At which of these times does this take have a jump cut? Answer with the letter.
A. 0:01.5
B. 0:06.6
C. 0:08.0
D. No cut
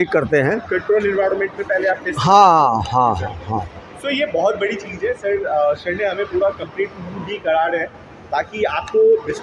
D